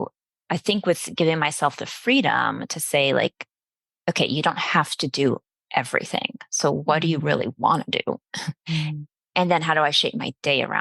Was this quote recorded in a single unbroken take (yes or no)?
no